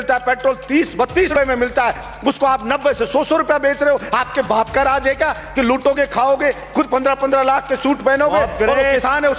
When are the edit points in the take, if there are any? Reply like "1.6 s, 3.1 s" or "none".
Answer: 1.3 s